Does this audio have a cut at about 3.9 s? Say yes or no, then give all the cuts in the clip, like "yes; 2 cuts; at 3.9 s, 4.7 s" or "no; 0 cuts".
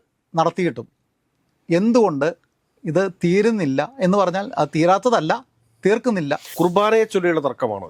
no; 1 cut; at 6.5 s